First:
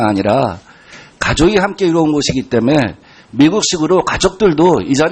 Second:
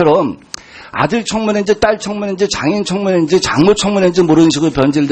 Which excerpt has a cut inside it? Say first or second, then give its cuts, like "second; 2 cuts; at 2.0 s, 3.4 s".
first; 1 cut; at 2.6 s